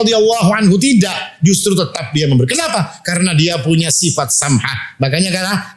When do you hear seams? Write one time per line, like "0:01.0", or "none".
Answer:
none